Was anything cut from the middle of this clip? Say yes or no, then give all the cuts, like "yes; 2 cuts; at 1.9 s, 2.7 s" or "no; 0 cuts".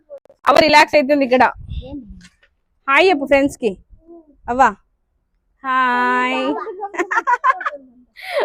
no; 0 cuts